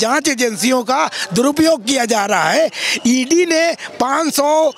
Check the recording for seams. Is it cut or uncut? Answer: uncut